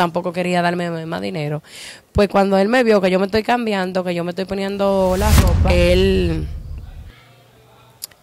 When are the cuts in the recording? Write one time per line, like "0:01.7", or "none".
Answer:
0:05.5